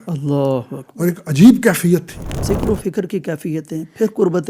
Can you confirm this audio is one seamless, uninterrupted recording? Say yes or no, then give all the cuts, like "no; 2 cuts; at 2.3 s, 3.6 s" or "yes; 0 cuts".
no; 1 cut; at 2.4 s